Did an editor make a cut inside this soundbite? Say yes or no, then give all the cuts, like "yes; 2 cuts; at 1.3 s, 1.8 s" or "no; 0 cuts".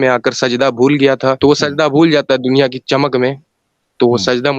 yes; 1 cut; at 1.4 s